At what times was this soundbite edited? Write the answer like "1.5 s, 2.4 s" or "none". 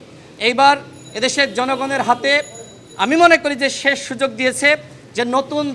none